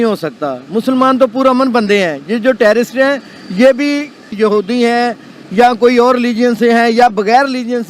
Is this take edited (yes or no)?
no